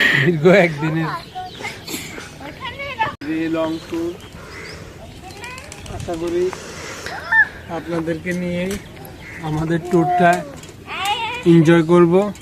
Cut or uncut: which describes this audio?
cut